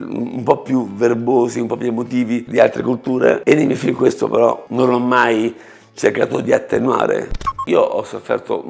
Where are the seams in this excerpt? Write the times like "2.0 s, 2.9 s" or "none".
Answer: 2.5 s, 7.4 s